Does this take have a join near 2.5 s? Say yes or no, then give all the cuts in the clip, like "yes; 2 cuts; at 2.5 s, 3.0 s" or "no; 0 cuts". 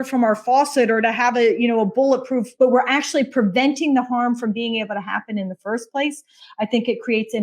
yes; 1 cut; at 2.5 s